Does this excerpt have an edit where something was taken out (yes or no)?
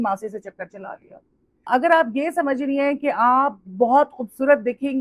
yes